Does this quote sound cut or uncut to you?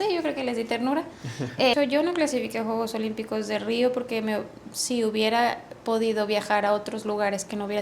cut